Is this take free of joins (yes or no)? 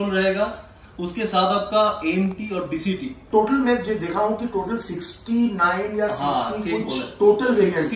no